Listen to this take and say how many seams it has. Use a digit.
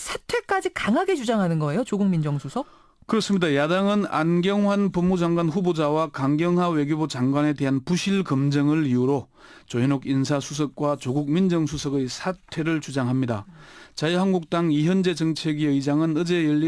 1